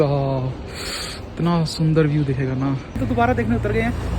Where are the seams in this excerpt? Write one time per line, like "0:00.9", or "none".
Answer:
0:03.0